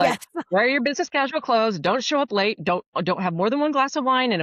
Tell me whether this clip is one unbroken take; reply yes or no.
yes